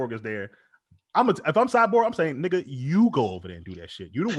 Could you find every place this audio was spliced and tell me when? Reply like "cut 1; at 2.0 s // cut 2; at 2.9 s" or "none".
none